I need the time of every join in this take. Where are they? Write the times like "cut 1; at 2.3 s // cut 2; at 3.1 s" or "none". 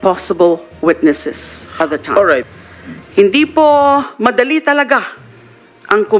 cut 1; at 2.5 s